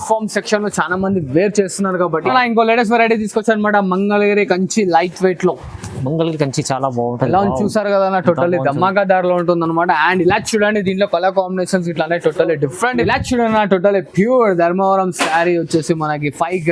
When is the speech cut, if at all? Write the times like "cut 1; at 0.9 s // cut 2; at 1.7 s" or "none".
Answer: cut 1; at 2.3 s // cut 2; at 13.0 s